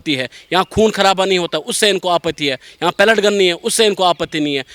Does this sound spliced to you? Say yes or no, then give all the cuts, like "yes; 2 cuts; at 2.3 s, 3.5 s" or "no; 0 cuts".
no; 0 cuts